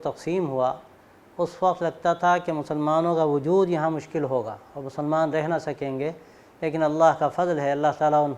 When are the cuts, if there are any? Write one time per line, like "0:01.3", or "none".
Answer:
none